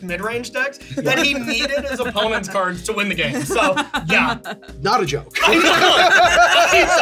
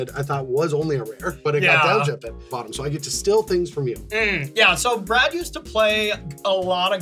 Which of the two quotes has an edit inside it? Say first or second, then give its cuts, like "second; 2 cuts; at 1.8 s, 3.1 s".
second; 1 cut; at 2.5 s